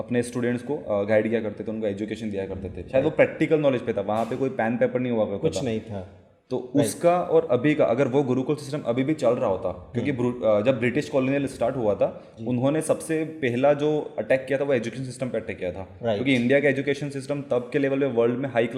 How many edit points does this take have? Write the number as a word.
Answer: zero